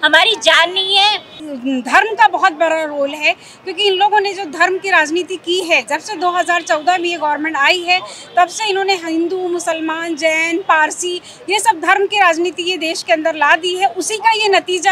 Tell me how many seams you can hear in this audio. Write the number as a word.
one